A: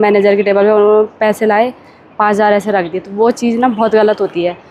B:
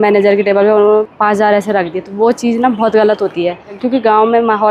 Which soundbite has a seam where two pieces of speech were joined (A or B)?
B